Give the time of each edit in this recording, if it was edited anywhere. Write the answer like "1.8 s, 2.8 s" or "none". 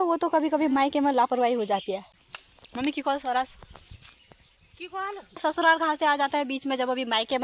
2.1 s, 5.4 s